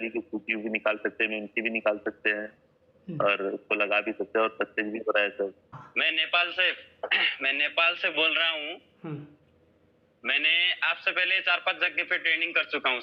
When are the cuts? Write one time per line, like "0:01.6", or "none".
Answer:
0:05.7